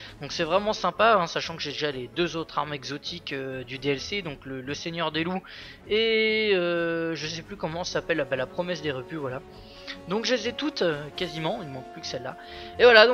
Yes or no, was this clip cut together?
yes